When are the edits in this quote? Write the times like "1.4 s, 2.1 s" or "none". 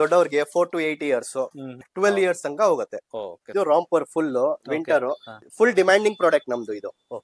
1.8 s, 3.5 s, 5.3 s